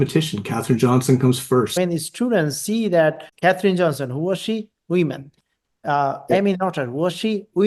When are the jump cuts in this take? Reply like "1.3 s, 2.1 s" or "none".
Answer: 1.7 s, 3.3 s